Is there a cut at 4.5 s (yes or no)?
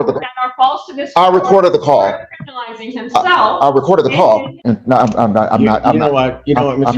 yes